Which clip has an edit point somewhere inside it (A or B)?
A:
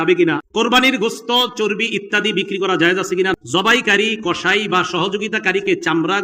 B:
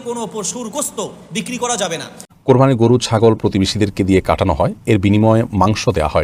B